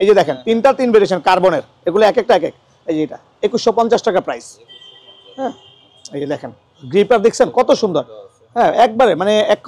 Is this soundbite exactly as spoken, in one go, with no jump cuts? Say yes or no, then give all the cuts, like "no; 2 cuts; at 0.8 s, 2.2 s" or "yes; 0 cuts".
yes; 0 cuts